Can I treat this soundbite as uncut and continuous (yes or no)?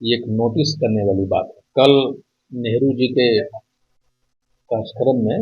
no